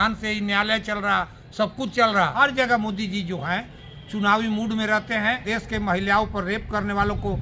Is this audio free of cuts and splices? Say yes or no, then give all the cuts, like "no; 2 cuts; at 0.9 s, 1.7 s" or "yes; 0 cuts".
no; 2 cuts; at 2.3 s, 5.4 s